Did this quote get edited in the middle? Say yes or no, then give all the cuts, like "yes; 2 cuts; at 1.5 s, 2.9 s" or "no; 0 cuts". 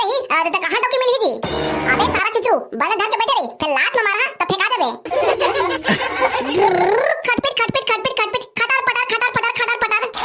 no; 0 cuts